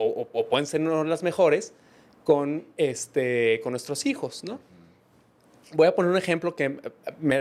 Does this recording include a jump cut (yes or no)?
no